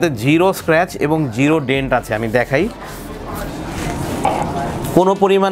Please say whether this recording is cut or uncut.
uncut